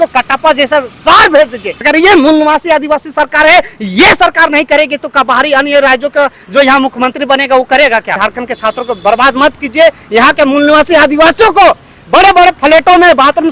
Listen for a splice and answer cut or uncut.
cut